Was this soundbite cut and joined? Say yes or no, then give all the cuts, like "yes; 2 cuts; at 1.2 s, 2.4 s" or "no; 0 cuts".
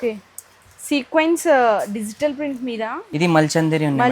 yes; 1 cut; at 3.0 s